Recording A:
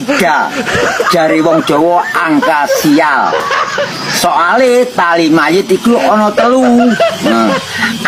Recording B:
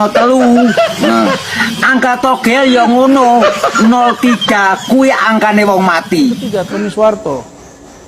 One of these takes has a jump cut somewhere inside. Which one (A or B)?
B